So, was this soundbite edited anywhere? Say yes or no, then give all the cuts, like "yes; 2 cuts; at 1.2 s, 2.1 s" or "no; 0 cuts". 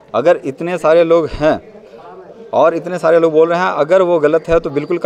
no; 0 cuts